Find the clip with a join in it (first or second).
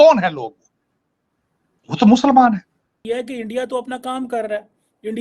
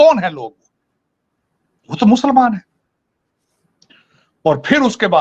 first